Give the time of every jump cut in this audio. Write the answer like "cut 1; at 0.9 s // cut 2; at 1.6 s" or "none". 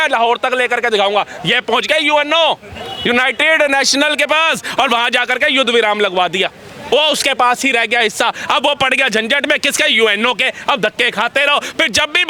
none